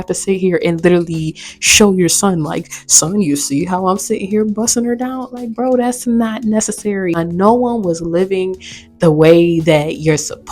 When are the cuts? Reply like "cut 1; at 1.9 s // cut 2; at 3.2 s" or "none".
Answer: cut 1; at 7.2 s